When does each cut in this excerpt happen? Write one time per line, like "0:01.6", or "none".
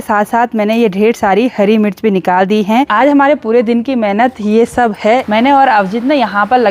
0:02.9
0:05.2